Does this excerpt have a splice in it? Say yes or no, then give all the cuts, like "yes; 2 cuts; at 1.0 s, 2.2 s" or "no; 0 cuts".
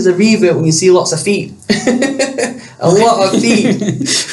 no; 0 cuts